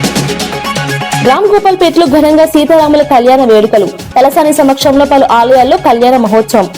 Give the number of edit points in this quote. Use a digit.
1